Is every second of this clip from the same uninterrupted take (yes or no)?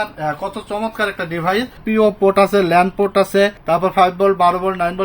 no